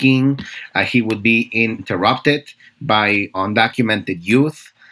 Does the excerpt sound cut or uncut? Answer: cut